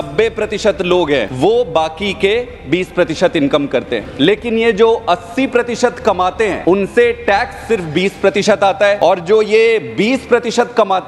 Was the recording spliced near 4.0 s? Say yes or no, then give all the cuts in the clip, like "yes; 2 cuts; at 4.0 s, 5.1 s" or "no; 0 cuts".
yes; 4 cuts; at 1.3 s, 4.0 s, 6.6 s, 9.0 s